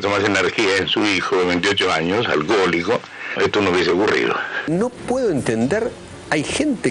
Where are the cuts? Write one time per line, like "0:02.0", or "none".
0:04.6